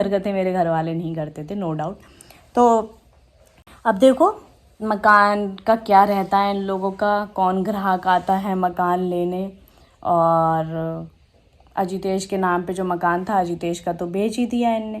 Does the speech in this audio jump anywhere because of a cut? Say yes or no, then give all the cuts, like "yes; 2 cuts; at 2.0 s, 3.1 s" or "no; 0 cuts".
no; 0 cuts